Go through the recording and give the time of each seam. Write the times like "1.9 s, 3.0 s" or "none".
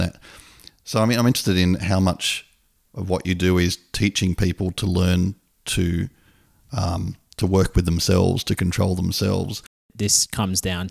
9.9 s